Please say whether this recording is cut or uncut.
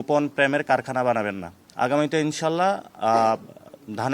cut